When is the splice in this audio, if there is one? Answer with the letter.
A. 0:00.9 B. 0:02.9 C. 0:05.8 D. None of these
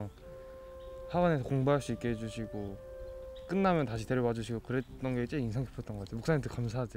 D